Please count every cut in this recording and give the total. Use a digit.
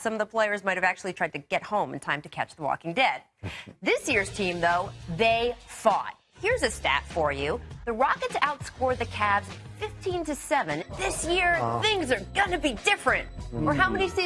0